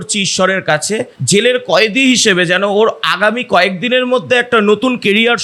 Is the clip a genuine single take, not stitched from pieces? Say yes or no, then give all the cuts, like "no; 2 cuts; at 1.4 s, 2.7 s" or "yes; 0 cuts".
yes; 0 cuts